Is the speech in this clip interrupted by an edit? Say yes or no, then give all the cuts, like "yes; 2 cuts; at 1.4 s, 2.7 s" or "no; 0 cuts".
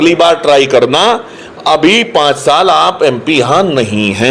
no; 0 cuts